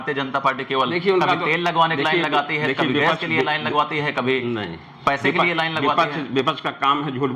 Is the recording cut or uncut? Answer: uncut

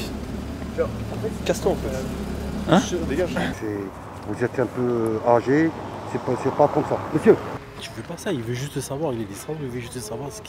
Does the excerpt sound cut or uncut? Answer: cut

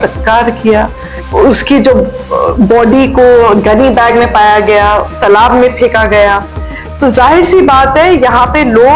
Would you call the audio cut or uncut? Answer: uncut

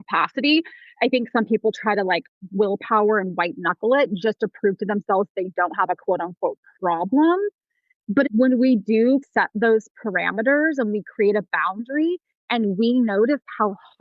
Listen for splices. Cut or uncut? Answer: cut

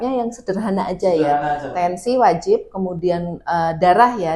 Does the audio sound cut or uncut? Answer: uncut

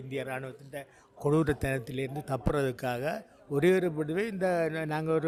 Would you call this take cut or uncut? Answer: uncut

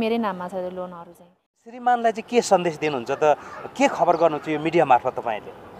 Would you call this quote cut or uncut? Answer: cut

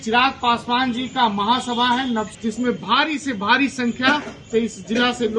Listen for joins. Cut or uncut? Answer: cut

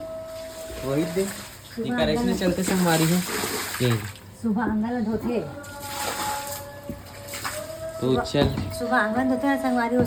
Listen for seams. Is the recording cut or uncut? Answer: uncut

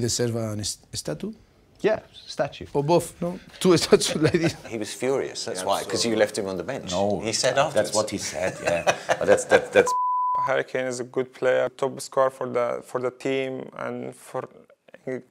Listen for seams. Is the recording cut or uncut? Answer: cut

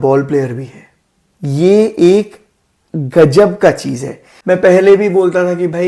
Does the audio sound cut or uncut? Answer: cut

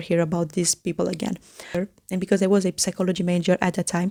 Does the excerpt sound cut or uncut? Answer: uncut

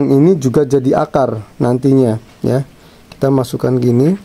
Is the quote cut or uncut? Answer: uncut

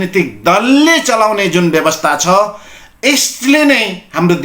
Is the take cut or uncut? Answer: uncut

